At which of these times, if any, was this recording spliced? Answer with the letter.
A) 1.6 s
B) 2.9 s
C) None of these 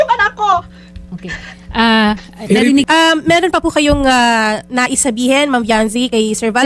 B